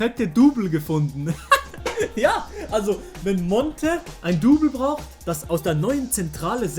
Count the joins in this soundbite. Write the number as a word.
one